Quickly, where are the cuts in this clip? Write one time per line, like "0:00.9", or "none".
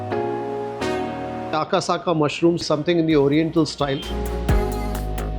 none